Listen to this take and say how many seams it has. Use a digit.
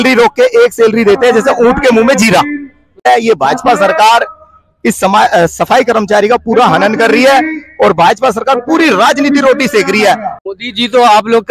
2